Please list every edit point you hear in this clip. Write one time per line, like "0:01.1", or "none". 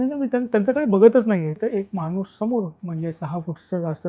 0:01.6
0:02.8